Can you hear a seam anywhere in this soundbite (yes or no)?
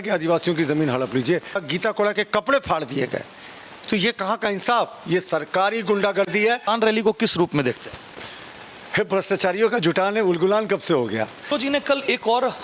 yes